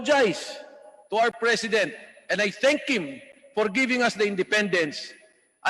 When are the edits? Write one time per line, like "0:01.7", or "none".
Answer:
none

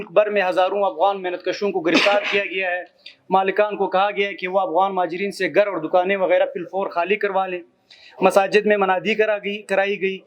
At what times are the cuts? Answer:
none

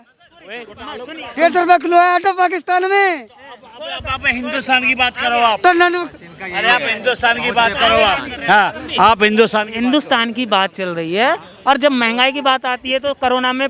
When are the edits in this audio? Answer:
none

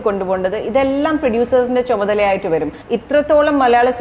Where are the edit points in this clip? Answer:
0:02.8

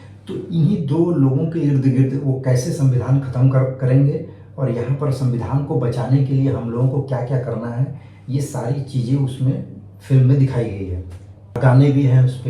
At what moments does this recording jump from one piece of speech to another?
0:11.6

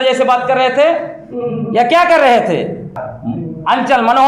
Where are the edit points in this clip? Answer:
0:02.9

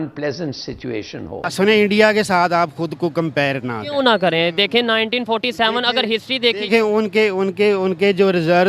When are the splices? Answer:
0:01.5

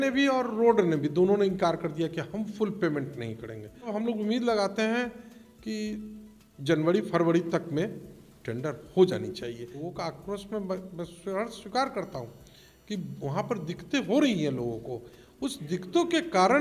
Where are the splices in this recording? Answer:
0:03.9
0:09.9

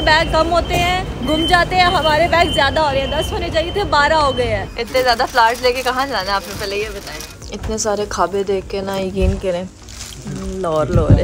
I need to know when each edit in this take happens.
0:04.7
0:07.3

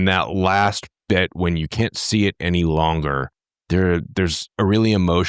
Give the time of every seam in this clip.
none

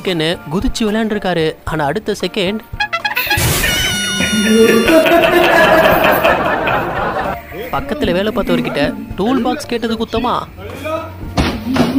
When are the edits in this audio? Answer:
none

